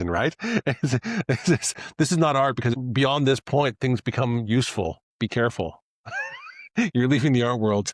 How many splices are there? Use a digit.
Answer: 2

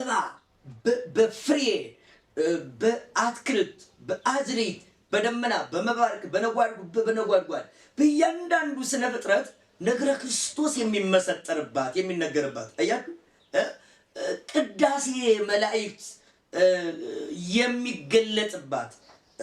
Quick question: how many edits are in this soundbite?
0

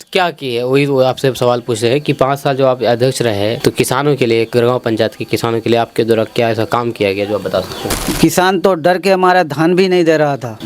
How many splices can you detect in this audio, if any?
2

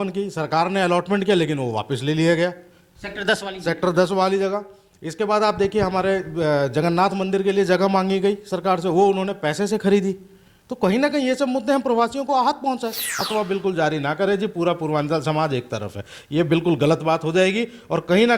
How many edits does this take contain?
1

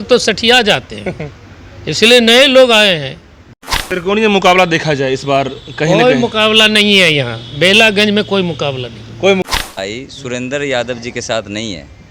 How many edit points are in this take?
2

